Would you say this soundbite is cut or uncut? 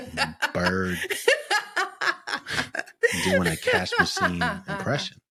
uncut